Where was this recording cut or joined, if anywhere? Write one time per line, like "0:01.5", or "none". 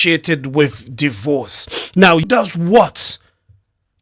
0:02.2

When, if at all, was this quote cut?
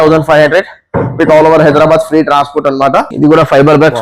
0:03.1

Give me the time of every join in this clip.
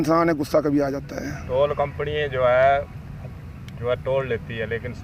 none

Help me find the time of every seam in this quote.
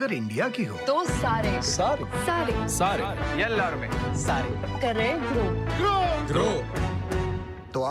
none

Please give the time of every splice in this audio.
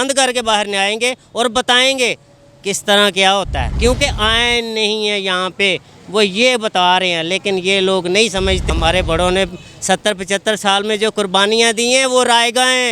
0:03.7
0:08.7

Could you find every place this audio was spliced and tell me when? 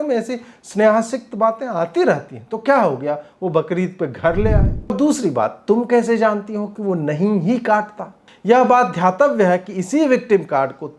0:04.9

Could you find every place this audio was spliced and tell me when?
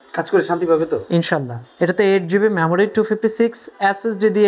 0:01.6

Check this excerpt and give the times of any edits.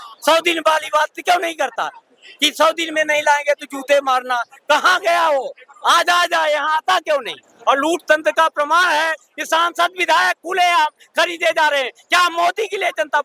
0:07.4

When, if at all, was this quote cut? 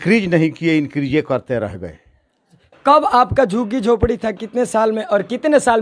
none

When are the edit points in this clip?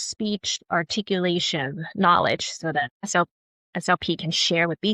0:03.1

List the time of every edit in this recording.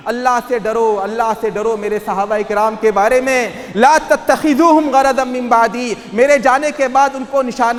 none

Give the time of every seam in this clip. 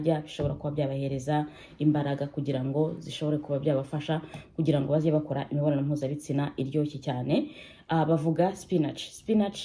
none

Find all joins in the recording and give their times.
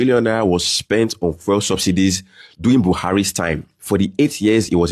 none

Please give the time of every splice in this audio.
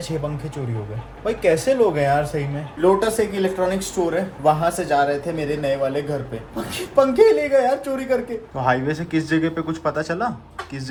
none

